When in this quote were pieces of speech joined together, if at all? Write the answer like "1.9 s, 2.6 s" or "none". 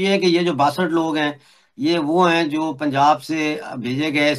none